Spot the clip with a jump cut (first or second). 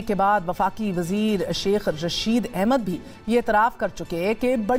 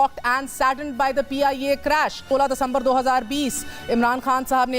second